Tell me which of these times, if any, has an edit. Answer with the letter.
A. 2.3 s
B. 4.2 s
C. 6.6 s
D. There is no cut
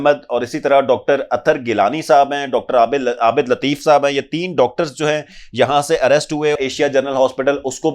C